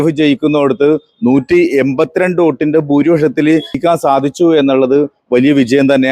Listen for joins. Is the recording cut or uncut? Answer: cut